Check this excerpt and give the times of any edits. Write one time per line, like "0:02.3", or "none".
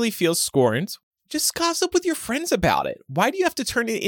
0:00.9